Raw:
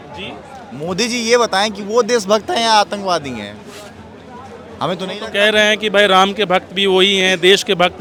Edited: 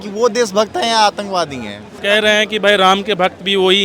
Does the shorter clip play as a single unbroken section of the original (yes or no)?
no